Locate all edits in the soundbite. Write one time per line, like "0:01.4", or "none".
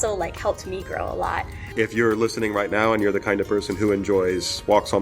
0:01.6

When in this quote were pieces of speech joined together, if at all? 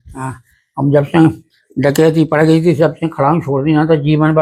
none

